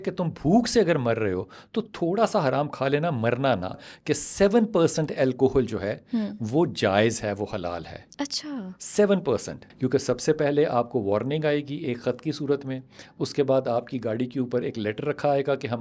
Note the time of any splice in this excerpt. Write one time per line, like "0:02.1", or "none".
0:03.8
0:09.6